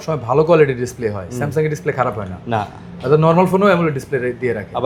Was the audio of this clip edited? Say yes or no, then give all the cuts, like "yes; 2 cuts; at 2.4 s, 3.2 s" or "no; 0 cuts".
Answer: no; 0 cuts